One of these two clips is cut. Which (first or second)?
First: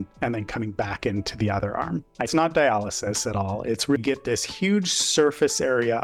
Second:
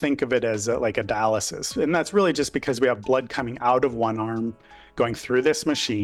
first